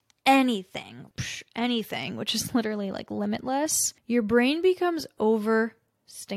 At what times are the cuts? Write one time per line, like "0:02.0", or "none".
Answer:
0:01.0

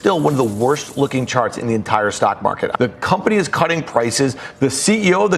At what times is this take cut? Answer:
0:02.7

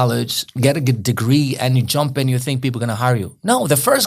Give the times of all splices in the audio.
none

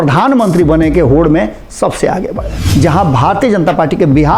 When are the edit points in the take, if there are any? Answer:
0:02.6

